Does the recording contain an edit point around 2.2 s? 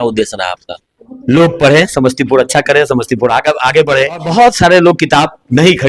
no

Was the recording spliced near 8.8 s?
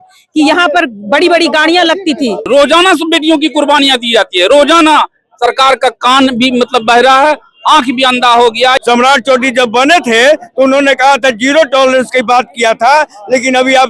yes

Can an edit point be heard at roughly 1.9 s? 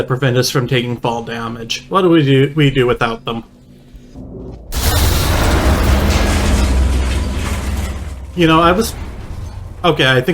no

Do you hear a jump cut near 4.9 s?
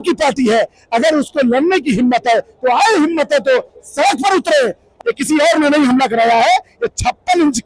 yes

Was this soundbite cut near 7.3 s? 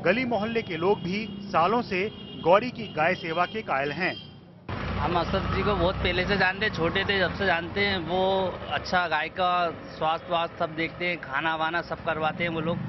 yes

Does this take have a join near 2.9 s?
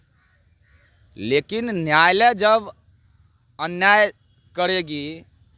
no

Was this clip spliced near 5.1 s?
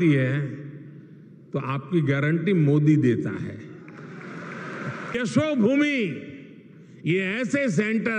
yes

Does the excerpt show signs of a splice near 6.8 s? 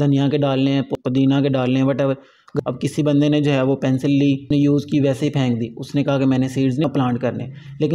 yes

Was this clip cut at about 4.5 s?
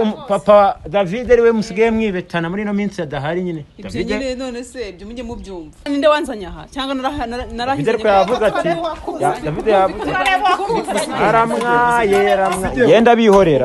no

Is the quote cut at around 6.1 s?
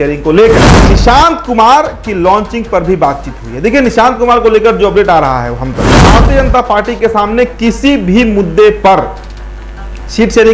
yes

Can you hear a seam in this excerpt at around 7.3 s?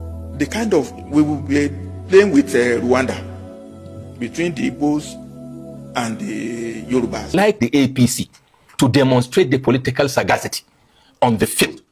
yes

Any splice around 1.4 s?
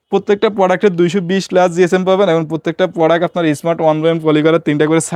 no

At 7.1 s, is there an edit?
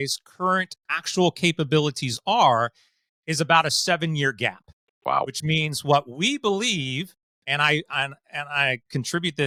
no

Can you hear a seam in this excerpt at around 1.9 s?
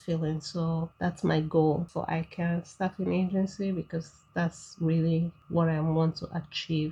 yes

